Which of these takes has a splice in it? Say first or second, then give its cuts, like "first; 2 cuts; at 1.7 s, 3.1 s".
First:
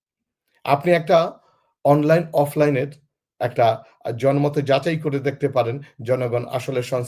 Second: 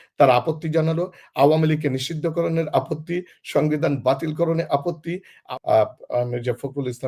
second; 1 cut; at 5.3 s